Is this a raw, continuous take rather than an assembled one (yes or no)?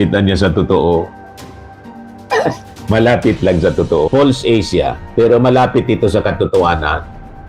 no